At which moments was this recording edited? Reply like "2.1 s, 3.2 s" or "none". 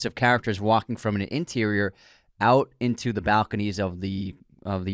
none